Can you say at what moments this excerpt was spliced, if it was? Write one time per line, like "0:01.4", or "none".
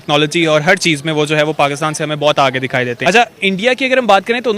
0:03.0